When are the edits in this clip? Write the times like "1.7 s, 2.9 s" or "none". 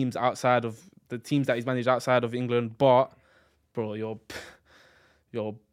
none